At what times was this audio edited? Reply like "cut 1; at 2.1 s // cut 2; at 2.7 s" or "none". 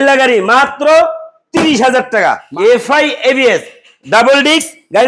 cut 1; at 2.5 s